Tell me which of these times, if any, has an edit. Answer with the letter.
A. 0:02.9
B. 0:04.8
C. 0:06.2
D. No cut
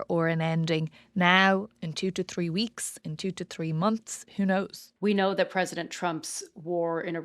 B